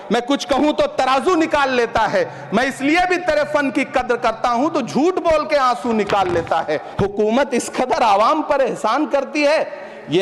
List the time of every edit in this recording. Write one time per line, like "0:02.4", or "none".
0:06.8